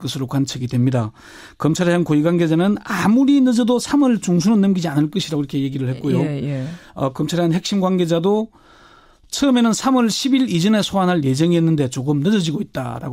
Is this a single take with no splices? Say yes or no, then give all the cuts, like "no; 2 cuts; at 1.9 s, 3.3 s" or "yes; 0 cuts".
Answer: yes; 0 cuts